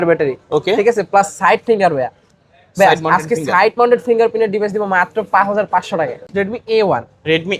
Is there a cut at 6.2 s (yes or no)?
yes